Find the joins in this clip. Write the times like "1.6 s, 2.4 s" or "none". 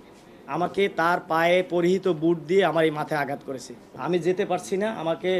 3.8 s